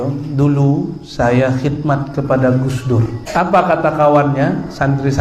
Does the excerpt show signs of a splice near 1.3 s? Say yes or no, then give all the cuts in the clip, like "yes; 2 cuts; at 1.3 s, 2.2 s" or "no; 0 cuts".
no; 1 cut; at 3.2 s